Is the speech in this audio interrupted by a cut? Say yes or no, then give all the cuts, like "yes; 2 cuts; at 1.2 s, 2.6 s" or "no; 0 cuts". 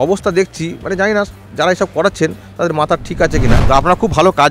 yes; 1 cut; at 3.5 s